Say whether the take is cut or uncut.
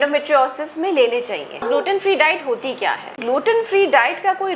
cut